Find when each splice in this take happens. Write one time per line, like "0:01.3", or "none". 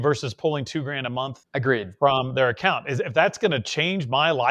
0:01.4